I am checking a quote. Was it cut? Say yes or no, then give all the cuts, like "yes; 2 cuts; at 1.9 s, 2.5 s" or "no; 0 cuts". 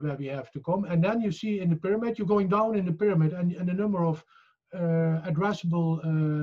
no; 0 cuts